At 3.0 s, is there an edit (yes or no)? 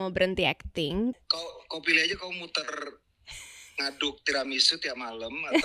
no